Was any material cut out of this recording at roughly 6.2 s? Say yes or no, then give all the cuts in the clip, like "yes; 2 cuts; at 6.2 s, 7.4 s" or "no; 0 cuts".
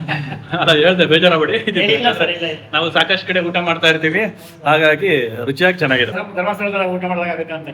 yes; 1 cut; at 6.2 s